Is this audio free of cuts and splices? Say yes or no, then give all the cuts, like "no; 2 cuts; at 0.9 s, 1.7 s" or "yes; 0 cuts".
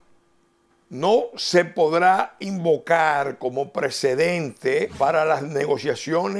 no; 1 cut; at 4.9 s